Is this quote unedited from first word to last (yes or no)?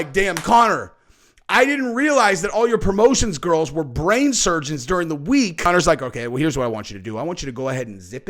no